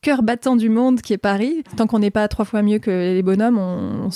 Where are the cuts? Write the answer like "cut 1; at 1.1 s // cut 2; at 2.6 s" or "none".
cut 1; at 1.8 s